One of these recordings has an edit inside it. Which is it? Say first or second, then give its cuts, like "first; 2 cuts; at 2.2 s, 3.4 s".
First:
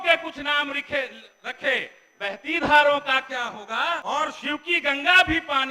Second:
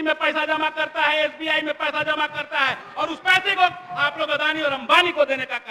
first; 1 cut; at 4.0 s